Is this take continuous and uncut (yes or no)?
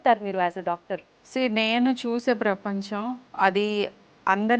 no